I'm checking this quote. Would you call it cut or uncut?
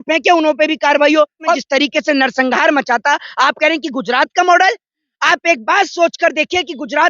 cut